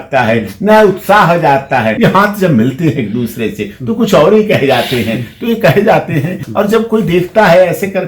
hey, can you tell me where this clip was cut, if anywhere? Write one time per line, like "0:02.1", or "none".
0:01.9
0:06.4

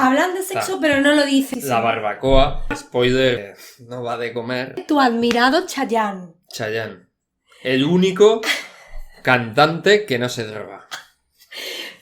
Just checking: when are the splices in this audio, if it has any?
0:01.5
0:02.7
0:03.4
0:04.8

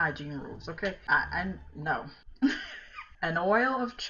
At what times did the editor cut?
none

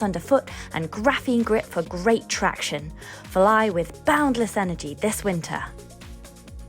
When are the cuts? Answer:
0:05.7

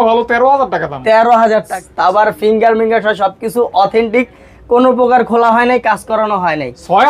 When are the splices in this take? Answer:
0:01.8

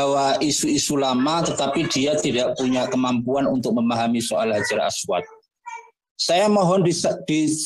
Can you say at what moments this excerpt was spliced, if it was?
0:06.1

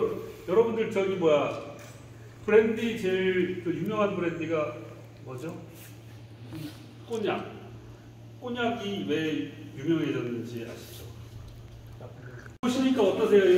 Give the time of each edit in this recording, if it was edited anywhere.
0:12.5

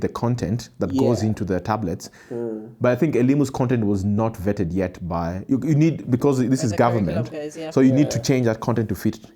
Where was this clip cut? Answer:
none

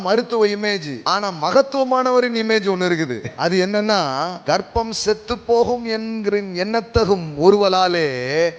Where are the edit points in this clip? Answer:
0:00.9
0:03.2
0:04.3

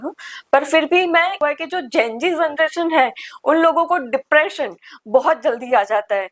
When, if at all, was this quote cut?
0:01.4

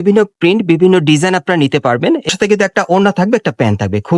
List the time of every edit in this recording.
0:02.3

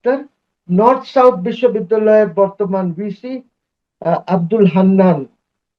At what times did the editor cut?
none

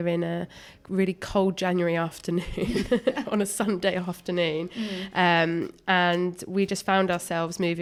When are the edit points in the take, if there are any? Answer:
none

